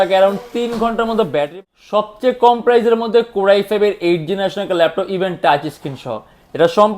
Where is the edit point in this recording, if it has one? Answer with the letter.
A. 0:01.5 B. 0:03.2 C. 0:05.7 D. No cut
A